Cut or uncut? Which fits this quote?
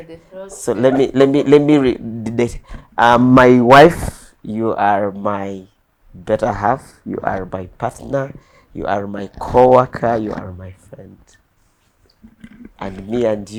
uncut